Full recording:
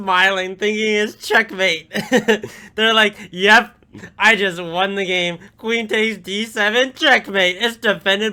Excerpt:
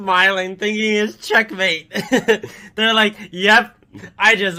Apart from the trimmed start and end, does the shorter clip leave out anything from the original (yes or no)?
no